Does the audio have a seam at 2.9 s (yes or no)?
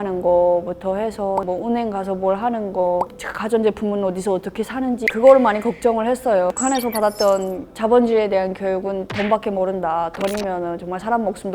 no